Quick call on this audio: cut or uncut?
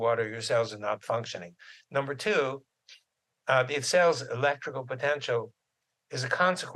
uncut